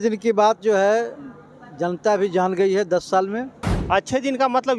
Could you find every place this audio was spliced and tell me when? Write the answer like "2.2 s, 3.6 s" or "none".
3.7 s